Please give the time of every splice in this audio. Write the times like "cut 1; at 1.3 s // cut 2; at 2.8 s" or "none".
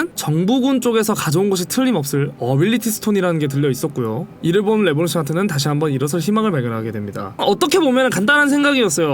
cut 1; at 7.3 s